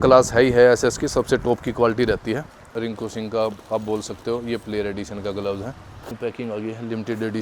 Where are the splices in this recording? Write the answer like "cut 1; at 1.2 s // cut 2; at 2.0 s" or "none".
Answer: cut 1; at 2.6 s // cut 2; at 6.1 s